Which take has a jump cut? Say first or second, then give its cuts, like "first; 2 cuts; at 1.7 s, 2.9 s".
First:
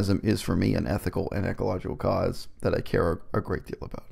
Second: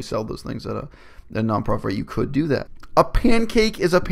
second; 1 cut; at 2.8 s